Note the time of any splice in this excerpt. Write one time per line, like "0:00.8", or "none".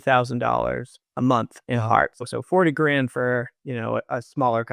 0:02.3